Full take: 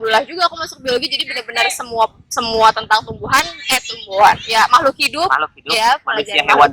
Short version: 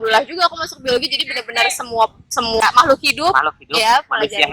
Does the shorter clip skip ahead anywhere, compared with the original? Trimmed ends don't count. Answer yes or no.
yes